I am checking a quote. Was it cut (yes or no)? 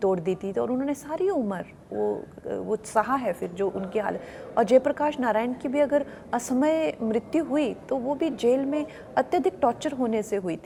no